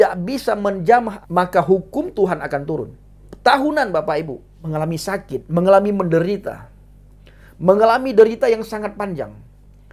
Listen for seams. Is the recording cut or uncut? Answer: cut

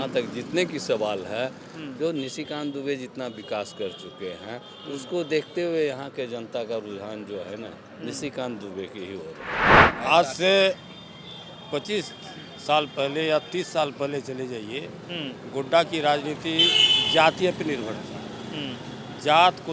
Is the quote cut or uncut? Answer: cut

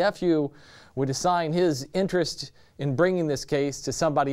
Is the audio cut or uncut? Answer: cut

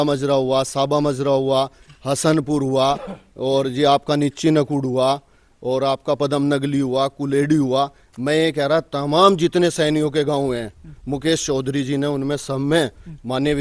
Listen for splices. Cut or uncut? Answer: uncut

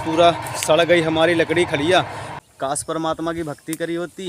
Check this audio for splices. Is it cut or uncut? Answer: cut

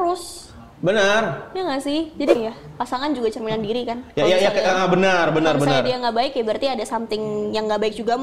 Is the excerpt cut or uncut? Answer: cut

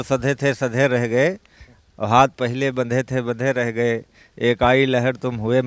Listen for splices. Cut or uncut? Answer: uncut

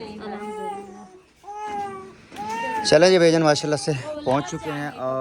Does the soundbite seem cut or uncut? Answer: uncut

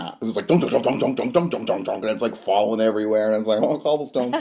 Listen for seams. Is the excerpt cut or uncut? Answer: uncut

